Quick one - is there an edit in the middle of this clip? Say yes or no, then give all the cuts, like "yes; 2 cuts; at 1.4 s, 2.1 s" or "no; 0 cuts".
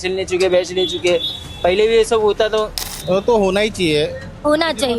yes; 1 cut; at 2.8 s